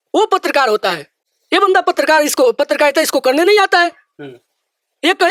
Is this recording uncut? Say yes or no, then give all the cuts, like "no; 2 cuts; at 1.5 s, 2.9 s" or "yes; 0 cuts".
yes; 0 cuts